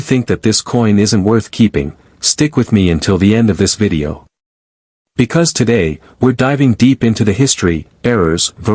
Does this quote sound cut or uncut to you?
uncut